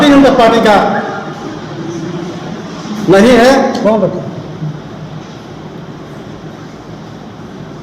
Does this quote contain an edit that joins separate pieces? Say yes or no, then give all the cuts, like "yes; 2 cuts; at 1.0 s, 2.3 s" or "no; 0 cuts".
no; 0 cuts